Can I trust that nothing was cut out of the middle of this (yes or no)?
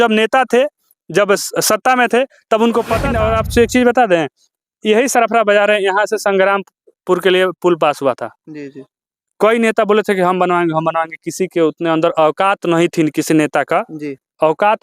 no